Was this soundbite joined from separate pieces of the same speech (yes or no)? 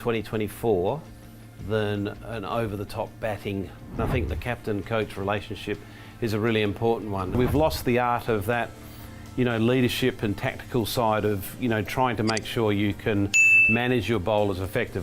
yes